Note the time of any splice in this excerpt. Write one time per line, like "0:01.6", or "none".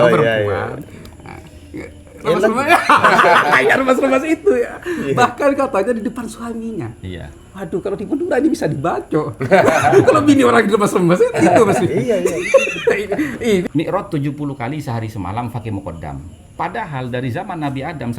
0:13.6
0:16.4